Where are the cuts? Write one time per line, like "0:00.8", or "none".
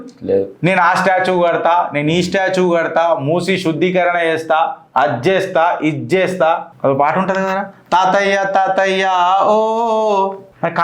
0:04.8
0:06.7